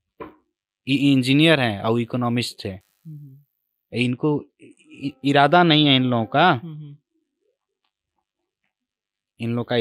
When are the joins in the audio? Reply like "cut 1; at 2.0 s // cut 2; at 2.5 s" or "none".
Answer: none